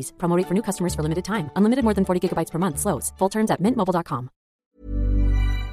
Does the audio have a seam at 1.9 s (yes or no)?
no